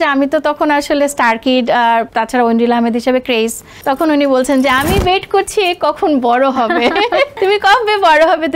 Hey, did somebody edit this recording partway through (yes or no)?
yes